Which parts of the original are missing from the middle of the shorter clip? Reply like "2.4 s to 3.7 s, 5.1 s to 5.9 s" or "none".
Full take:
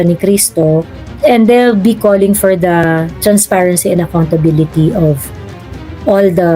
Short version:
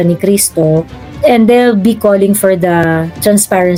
none